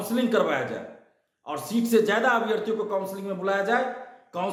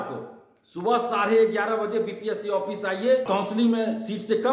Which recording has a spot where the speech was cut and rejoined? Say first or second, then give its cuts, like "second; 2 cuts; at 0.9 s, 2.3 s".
second; 1 cut; at 3.3 s